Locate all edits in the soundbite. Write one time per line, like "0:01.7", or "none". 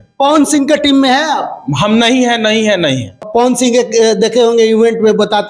0:03.2